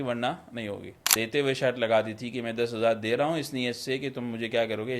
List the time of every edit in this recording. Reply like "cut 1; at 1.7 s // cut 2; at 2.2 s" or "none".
cut 1; at 1.1 s